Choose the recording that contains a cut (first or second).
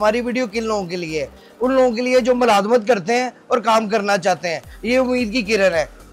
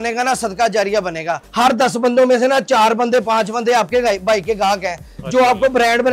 second